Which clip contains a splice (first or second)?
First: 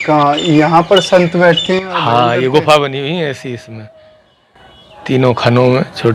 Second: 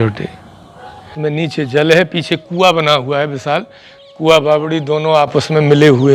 second